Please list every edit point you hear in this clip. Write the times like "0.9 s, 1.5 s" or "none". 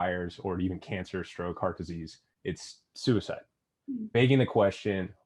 4.1 s